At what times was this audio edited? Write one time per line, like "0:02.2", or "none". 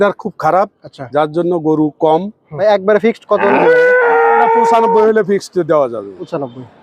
0:02.4